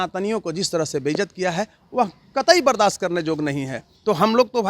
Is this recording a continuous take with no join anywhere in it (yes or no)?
yes